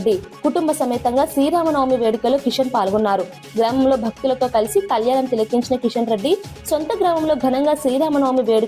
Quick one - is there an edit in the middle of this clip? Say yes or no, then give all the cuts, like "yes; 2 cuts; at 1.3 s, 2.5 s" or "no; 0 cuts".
no; 0 cuts